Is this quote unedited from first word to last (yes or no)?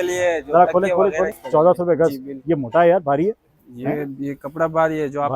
no